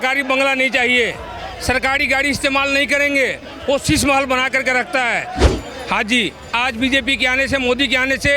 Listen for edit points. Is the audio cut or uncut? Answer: cut